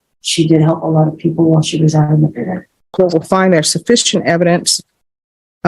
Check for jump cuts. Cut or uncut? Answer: cut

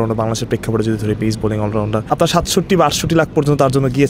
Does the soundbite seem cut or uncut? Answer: cut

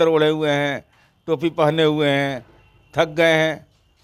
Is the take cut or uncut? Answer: uncut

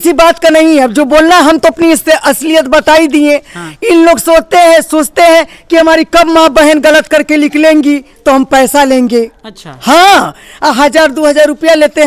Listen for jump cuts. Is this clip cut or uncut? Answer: uncut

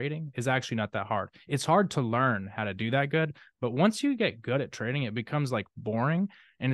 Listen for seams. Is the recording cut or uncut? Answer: uncut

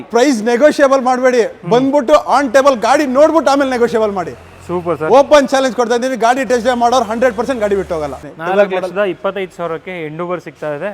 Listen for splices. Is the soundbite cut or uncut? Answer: cut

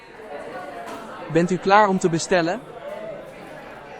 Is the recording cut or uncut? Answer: cut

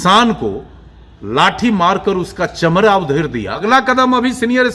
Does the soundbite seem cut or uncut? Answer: cut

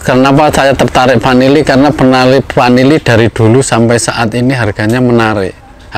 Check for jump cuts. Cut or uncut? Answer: uncut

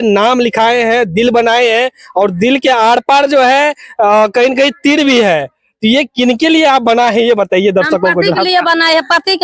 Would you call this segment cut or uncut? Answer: uncut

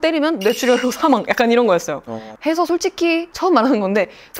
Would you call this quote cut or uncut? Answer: cut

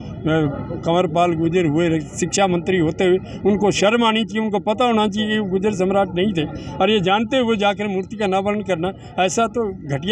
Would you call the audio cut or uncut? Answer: uncut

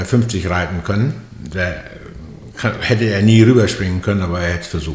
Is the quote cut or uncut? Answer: uncut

